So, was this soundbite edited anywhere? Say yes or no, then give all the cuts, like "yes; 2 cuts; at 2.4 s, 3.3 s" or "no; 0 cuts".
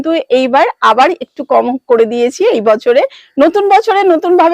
no; 0 cuts